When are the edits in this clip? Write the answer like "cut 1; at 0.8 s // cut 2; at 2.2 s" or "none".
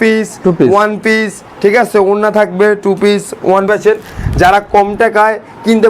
cut 1; at 3.7 s